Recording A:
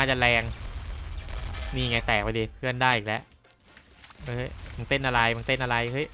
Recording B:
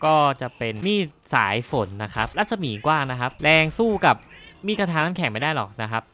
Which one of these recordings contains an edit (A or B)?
B